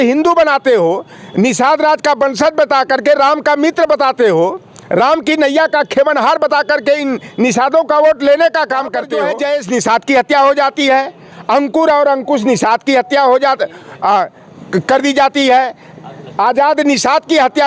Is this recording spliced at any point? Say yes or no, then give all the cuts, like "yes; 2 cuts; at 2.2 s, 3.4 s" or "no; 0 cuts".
yes; 1 cut; at 9.1 s